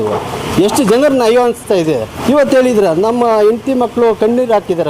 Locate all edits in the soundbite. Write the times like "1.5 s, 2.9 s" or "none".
2.2 s

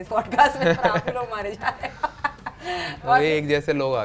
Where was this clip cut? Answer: none

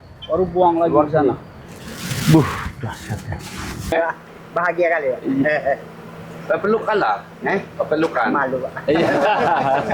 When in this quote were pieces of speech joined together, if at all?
3.9 s

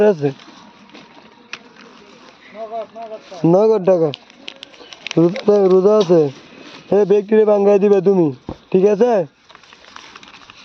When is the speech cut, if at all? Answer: none

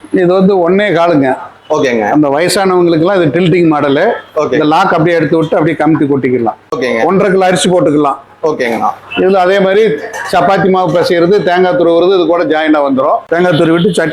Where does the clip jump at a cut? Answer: 6.7 s, 13.2 s

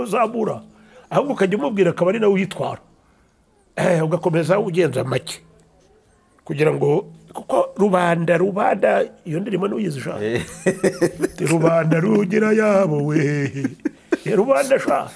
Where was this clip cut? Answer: none

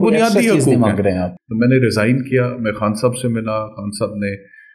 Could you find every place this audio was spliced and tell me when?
1.3 s

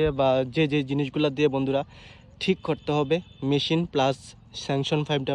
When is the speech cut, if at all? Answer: none

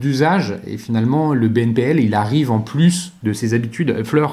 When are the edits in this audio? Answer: 3.1 s

